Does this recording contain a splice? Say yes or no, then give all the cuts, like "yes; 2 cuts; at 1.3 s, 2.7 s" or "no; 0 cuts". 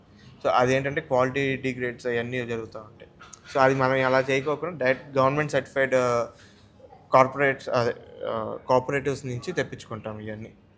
no; 0 cuts